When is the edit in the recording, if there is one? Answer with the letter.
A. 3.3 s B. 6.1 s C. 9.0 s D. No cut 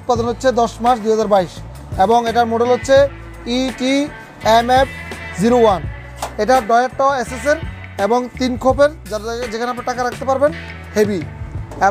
B